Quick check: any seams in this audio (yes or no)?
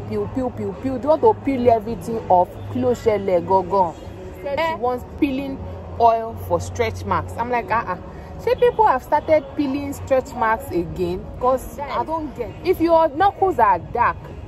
yes